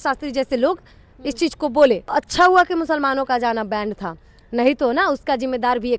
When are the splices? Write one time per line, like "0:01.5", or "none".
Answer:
0:02.1